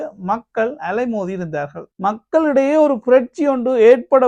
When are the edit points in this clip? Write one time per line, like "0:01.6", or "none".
0:01.9